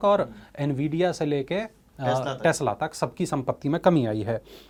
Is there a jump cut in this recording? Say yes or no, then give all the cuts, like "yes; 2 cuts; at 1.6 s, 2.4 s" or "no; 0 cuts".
no; 0 cuts